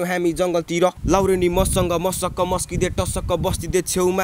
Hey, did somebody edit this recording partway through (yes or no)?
yes